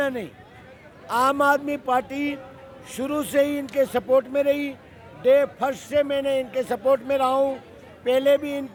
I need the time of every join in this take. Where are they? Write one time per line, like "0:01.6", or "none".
none